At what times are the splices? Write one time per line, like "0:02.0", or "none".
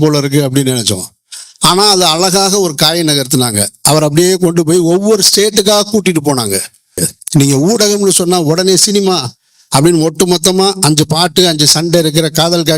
0:07.0